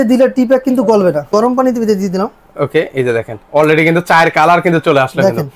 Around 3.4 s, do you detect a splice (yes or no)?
no